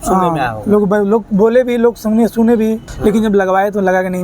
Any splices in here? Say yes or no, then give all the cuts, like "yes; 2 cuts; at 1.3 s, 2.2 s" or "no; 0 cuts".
yes; 1 cut; at 2.9 s